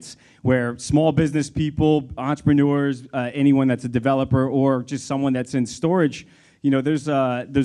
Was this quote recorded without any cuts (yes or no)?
yes